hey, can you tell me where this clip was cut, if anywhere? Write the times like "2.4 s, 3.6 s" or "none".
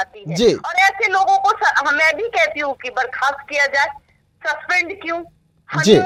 none

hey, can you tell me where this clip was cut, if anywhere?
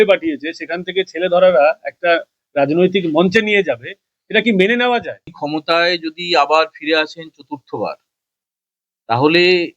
5.4 s

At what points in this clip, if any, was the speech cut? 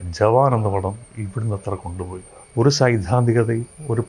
2.4 s

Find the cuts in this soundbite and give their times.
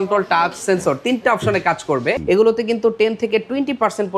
2.2 s

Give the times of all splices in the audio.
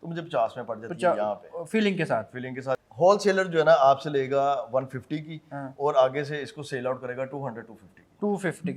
2.8 s

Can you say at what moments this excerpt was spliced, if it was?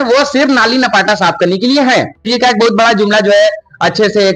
2.3 s

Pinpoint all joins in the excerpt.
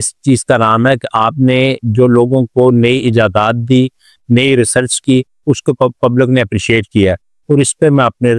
none

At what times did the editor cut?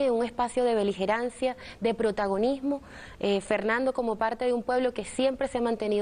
1.2 s

